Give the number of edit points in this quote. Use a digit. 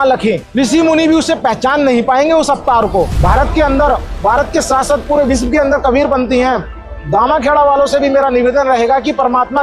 1